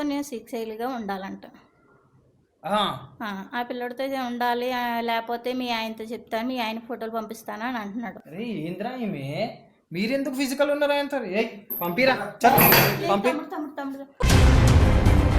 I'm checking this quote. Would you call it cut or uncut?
cut